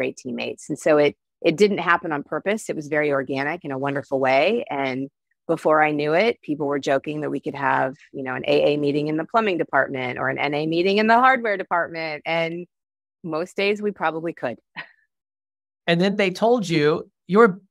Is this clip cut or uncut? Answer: uncut